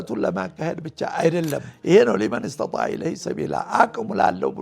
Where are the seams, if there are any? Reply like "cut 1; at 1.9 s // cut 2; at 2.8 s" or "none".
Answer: cut 1; at 1.7 s